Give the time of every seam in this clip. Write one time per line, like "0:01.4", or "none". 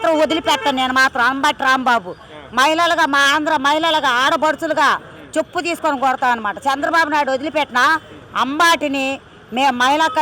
none